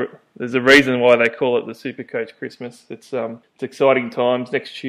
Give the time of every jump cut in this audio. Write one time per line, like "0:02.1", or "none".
0:03.4